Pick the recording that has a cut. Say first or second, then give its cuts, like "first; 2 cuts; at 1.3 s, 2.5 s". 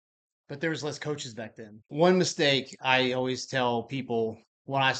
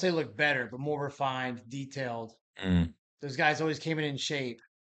first; 1 cut; at 1.9 s